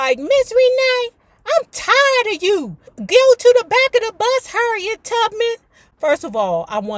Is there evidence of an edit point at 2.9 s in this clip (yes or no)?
yes